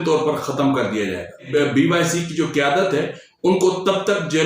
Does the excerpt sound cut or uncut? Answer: cut